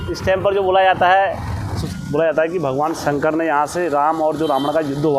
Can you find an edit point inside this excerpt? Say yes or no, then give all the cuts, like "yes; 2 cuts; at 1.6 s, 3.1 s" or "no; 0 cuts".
yes; 1 cut; at 1.7 s